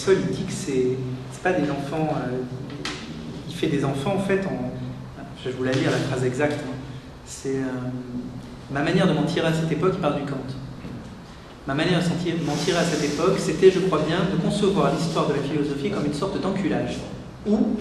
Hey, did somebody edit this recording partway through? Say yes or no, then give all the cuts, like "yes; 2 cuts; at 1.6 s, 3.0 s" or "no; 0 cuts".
yes; 1 cut; at 6.0 s